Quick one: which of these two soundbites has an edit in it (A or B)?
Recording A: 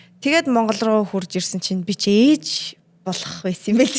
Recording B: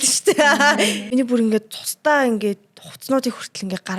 B